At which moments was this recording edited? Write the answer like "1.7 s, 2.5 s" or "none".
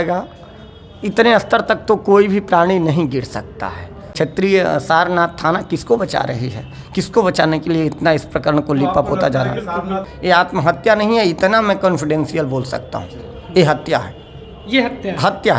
4.0 s, 10.1 s

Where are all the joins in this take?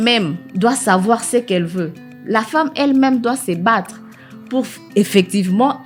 none

